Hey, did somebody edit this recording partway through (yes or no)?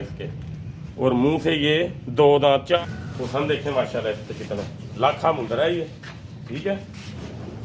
yes